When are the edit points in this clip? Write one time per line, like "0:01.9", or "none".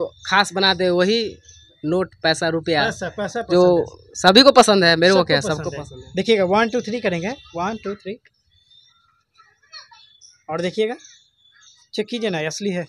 none